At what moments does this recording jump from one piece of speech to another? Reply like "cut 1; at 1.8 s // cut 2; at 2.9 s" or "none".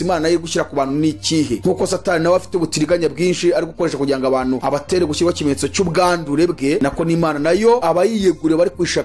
cut 1; at 1.6 s // cut 2; at 4.6 s // cut 3; at 6.8 s // cut 4; at 7.8 s